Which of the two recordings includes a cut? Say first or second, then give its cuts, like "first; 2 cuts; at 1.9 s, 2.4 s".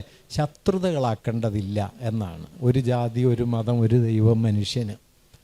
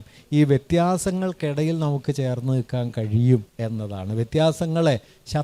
first; 1 cut; at 2.4 s